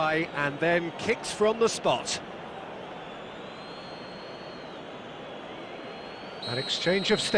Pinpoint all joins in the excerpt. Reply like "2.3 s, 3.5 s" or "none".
none